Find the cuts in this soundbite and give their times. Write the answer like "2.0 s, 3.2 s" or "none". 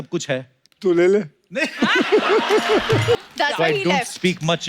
3.2 s